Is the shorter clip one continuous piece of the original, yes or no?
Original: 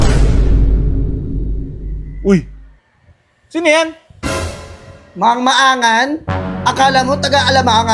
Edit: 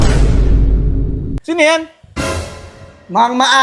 no